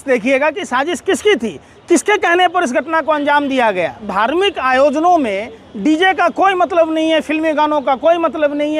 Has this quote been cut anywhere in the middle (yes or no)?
yes